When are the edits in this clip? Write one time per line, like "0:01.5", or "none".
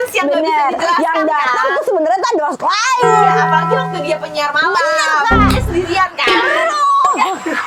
none